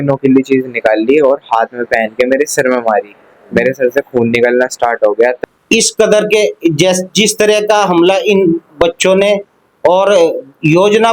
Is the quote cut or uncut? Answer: cut